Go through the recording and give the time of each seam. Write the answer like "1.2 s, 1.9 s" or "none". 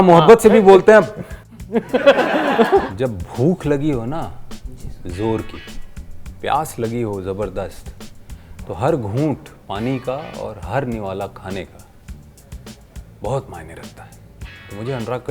2.9 s